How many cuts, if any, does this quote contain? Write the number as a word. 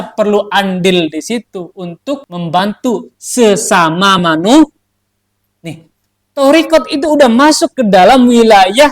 one